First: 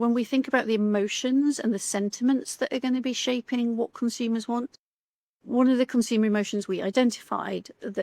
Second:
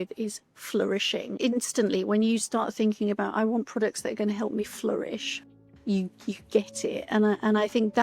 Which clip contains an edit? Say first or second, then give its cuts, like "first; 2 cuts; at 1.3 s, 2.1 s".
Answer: second; 1 cut; at 1.4 s